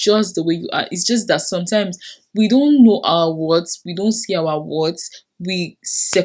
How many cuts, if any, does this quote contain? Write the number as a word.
zero